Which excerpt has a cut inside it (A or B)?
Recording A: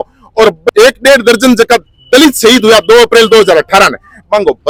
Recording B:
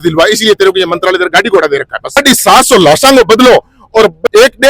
B